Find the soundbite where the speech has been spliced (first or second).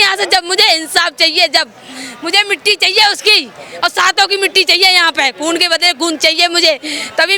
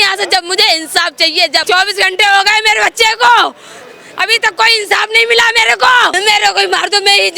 second